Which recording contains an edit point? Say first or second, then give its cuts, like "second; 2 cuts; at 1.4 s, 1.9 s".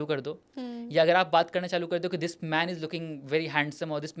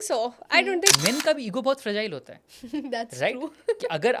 second; 1 cut; at 0.9 s